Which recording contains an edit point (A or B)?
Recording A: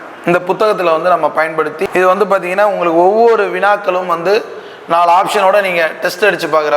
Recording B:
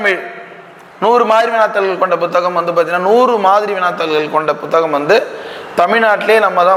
A